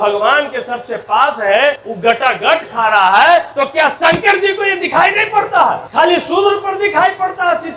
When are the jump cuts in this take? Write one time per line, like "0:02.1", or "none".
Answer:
0:01.9
0:03.5
0:05.8

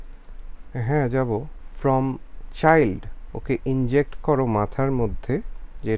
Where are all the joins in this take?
0:01.6

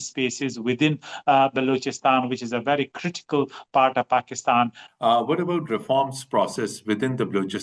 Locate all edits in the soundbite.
0:04.8

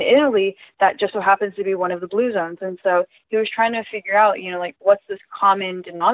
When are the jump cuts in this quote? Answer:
none

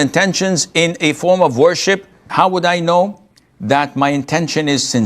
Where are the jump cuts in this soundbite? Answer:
0:02.2

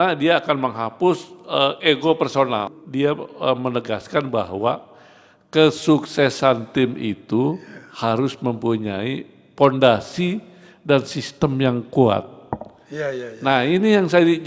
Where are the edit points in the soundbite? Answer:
0:02.8

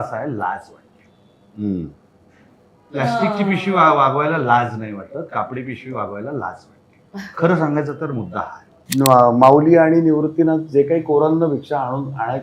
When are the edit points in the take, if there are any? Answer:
0:08.8

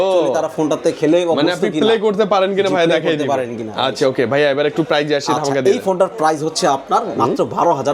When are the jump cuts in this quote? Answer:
none

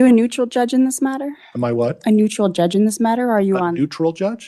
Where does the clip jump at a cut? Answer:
none

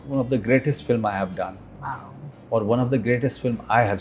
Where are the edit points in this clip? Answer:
none

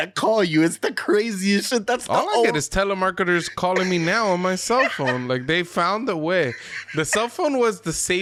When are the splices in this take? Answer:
none

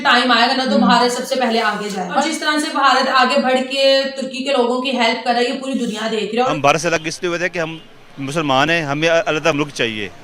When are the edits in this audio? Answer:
0:02.2
0:06.4

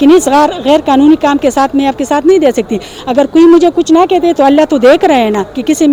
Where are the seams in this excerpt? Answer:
none

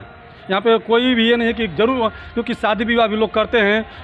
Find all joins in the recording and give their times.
none

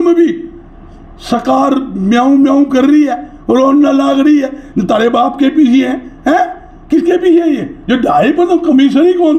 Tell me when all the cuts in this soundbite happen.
0:07.7

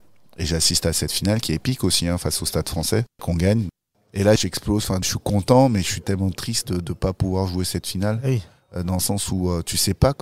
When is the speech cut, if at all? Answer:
none

